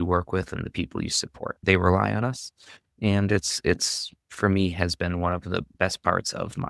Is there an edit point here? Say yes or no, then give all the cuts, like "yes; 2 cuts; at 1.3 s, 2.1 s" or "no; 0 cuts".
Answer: yes; 2 cuts; at 1.6 s, 5.7 s